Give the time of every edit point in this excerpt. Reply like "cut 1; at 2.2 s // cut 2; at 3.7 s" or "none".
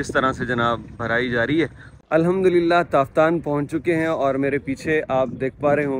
cut 1; at 1.9 s